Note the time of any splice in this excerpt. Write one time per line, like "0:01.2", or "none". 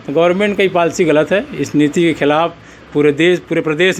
none

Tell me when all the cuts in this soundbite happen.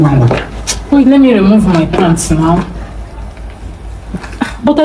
none

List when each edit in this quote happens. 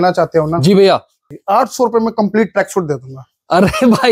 0:01.3

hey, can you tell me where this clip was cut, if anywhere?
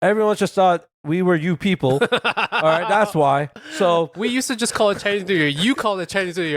0:04.1

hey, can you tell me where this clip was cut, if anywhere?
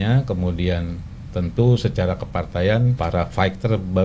0:02.9

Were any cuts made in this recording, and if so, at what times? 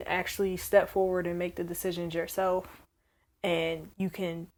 none

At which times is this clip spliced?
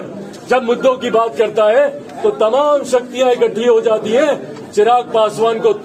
none

